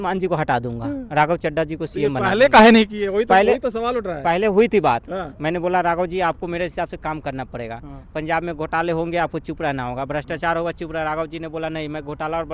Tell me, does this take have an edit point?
no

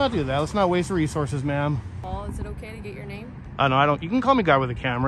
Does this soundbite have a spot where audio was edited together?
yes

